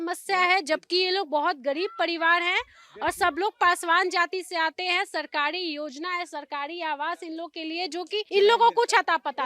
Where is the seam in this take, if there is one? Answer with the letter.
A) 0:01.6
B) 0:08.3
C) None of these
B